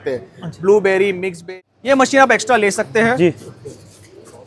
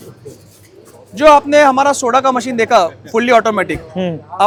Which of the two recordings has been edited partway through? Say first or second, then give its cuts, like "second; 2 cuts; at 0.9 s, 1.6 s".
first; 1 cut; at 1.3 s